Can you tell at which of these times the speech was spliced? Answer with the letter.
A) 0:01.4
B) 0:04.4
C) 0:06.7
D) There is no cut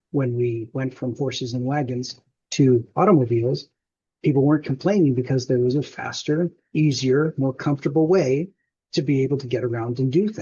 D